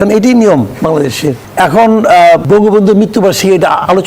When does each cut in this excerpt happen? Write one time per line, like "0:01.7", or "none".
0:01.0
0:02.4